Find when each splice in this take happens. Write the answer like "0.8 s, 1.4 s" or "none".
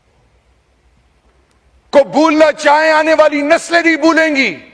none

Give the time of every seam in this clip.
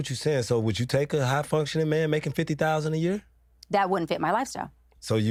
none

